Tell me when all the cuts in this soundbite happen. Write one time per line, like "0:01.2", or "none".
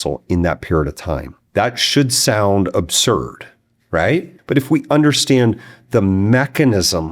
0:01.4
0:04.3